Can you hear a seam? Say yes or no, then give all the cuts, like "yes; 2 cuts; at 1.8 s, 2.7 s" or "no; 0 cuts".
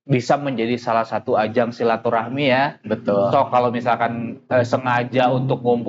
no; 0 cuts